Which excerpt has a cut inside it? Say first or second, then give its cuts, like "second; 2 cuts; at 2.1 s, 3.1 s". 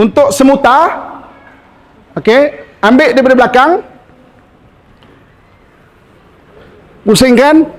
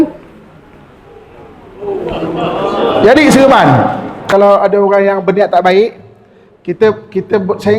second; 1 cut; at 4.3 s